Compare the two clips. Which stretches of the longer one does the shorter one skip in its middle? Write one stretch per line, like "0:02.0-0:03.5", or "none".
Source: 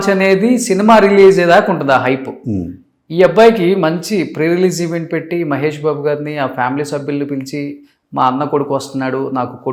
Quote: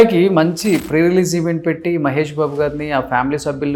none